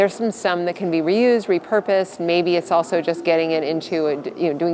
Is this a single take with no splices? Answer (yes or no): yes